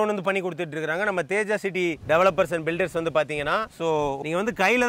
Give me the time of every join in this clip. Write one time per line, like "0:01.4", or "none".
none

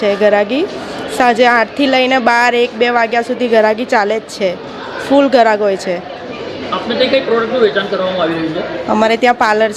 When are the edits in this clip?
none

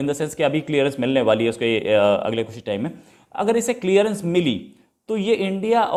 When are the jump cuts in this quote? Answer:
none

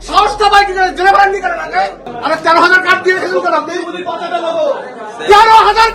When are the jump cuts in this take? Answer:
0:02.1

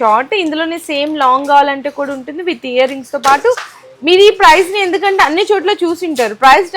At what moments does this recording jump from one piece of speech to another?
none

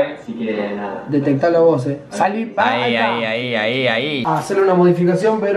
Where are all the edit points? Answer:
0:04.2

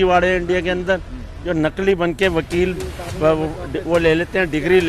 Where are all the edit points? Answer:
none

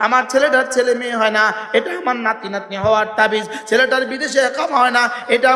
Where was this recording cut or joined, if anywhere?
none

